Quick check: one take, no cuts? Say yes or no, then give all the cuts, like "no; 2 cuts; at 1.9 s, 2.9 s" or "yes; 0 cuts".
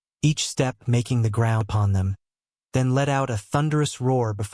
no; 1 cut; at 1.7 s